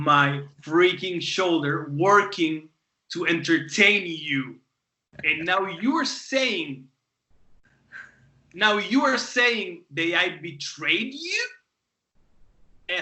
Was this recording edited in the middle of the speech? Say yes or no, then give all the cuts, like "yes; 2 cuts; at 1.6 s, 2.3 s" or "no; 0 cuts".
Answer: no; 0 cuts